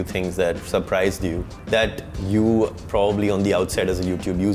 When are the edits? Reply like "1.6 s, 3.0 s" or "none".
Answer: none